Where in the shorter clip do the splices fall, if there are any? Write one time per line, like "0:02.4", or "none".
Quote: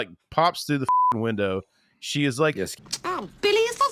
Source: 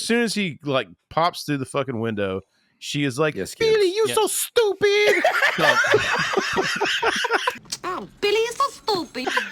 0:02.8

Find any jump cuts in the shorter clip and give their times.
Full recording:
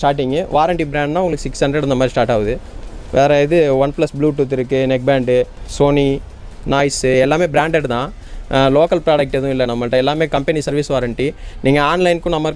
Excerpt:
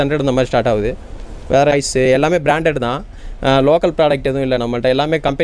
0:01.7

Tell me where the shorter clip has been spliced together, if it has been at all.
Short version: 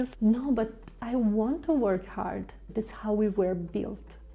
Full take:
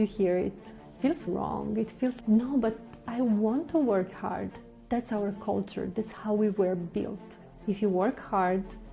0:02.6

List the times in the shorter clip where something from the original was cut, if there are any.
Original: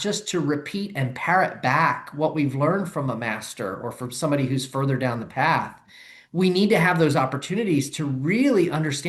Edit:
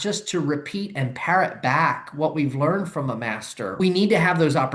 0:03.8

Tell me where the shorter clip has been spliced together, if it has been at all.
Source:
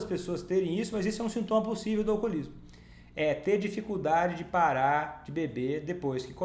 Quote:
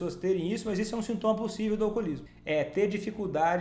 0:02.3

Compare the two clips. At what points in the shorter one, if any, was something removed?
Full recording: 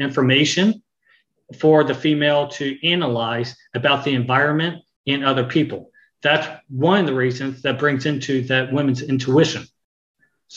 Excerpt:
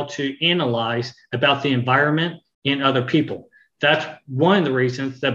none

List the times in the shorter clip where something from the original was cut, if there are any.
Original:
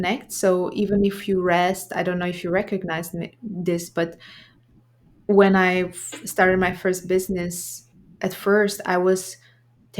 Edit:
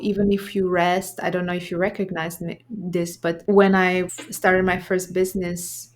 0:03.4
0:04.2

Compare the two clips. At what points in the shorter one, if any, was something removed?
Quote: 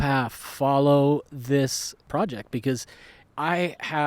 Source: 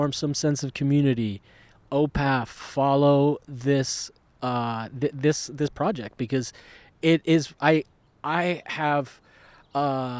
0:02.1
0:03.2

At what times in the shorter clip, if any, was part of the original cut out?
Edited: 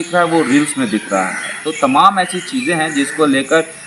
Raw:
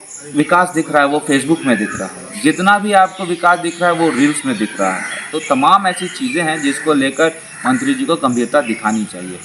none

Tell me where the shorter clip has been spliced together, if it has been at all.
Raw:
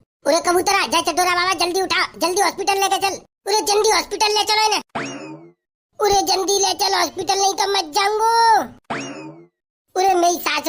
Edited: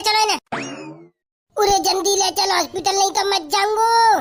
none

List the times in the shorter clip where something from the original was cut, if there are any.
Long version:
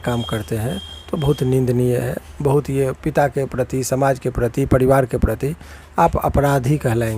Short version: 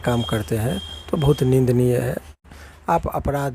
0:02.3

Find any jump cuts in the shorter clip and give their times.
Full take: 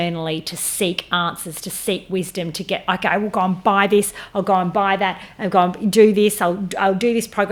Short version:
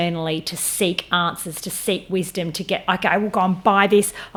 none

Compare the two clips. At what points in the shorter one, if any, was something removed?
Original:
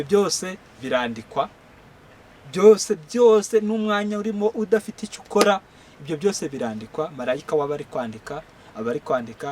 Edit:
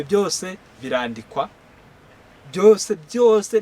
none

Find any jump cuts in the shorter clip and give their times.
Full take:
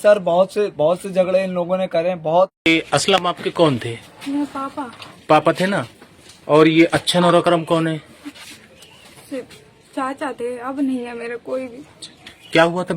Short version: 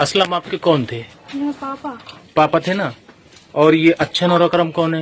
none

